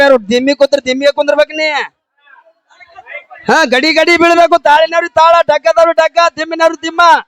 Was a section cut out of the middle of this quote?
no; 0 cuts

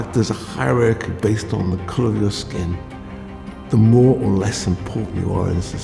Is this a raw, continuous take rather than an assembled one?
yes; 0 cuts

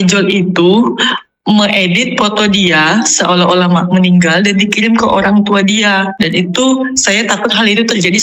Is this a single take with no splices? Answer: yes; 0 cuts

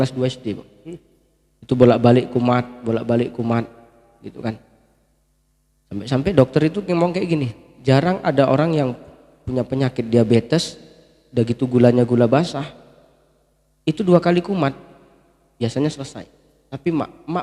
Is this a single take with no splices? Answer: yes; 0 cuts

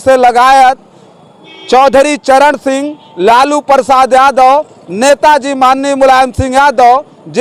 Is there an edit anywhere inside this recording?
no; 0 cuts

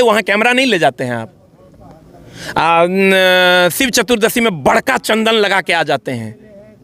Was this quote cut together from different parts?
no; 0 cuts

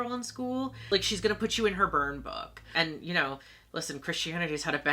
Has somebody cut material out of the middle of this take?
yes; 2 cuts; at 0.8 s, 2.7 s

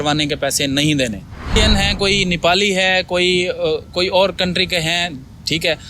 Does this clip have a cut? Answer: yes; 1 cut; at 1.6 s

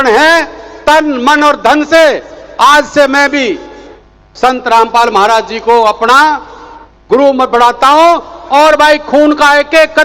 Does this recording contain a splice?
no; 0 cuts

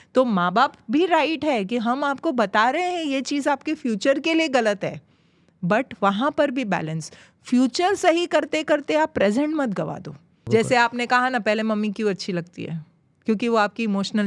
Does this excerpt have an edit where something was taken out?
yes; 1 cut; at 10.4 s

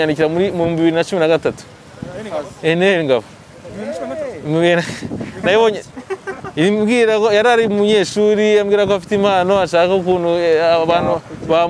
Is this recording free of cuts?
yes; 0 cuts

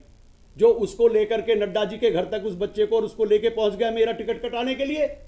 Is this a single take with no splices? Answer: yes; 0 cuts

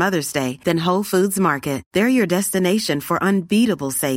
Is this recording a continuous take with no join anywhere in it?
yes; 0 cuts

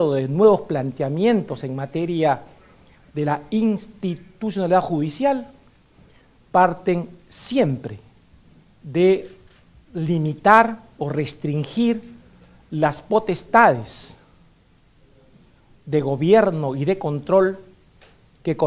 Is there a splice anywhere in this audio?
yes; 1 cut; at 13.3 s

